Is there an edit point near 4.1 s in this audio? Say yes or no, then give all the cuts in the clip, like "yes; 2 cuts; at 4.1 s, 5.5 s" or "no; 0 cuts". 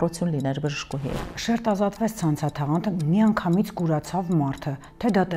no; 1 cut; at 1.2 s